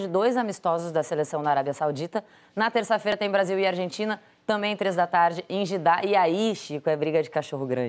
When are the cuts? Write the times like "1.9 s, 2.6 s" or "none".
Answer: 3.2 s